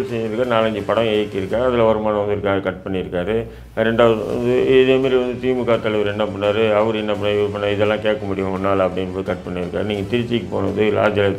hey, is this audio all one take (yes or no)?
yes